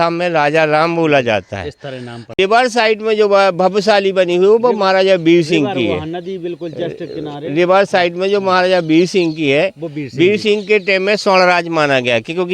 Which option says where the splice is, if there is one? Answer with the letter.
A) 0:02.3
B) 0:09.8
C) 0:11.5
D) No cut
A